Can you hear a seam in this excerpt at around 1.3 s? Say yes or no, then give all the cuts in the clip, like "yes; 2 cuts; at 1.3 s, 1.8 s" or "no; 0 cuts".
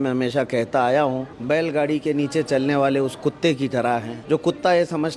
yes; 2 cuts; at 1.3 s, 4.1 s